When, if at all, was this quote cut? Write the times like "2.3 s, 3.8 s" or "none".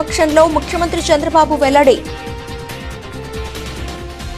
2.6 s